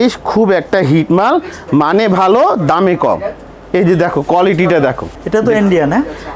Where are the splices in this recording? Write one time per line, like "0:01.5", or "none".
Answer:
0:05.1